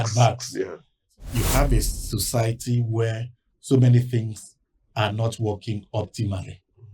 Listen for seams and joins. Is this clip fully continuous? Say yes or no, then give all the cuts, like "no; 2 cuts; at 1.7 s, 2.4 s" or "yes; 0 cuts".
no; 1 cut; at 1.1 s